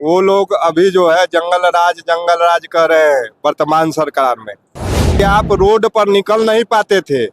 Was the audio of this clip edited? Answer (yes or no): yes